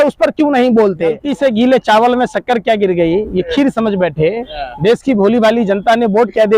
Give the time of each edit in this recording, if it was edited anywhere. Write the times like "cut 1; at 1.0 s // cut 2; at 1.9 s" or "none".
cut 1; at 1.3 s